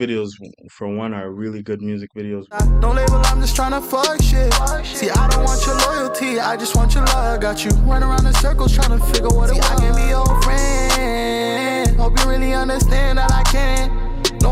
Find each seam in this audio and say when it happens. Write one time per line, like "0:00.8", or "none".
none